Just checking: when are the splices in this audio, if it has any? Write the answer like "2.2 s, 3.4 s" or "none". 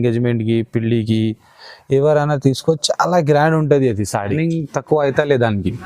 4.3 s